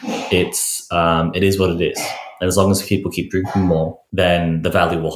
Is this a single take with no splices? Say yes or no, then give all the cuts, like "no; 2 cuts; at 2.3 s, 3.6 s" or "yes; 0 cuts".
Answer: no; 1 cut; at 4.0 s